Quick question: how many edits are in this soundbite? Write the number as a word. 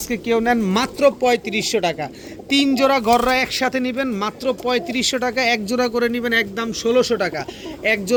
zero